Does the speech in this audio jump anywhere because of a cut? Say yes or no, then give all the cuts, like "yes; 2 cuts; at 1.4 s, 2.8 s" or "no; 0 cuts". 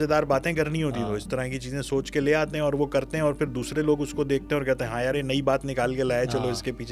no; 0 cuts